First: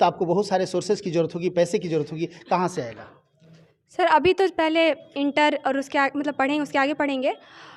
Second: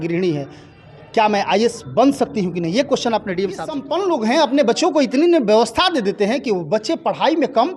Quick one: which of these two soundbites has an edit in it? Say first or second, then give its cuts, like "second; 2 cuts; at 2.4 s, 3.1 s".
second; 1 cut; at 3.9 s